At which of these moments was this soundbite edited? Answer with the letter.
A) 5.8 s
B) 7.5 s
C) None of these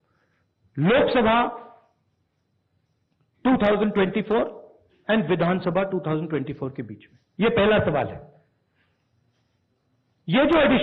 C